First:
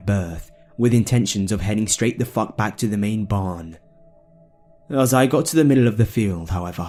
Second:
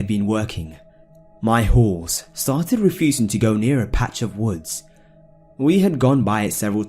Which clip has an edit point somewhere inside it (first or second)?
second